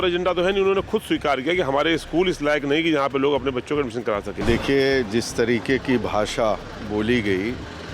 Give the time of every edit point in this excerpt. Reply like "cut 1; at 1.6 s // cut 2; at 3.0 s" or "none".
cut 1; at 4.3 s